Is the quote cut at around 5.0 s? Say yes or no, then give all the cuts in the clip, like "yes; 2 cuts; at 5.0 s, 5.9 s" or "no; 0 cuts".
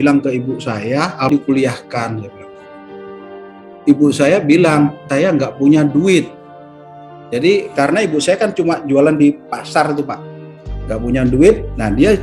yes; 2 cuts; at 1.3 s, 5.0 s